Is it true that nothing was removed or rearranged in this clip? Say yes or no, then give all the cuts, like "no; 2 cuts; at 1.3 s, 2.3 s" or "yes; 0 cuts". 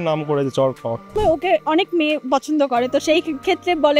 no; 1 cut; at 1.1 s